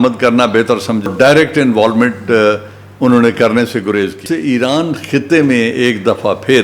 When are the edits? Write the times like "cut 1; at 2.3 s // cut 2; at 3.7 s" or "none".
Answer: cut 1; at 1.1 s // cut 2; at 4.2 s